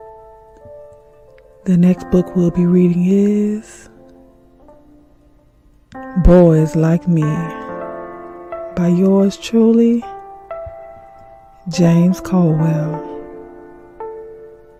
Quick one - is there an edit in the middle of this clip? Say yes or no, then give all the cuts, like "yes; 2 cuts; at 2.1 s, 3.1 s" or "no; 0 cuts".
no; 0 cuts